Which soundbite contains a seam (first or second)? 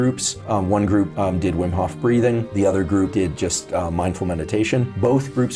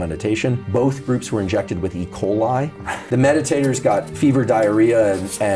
second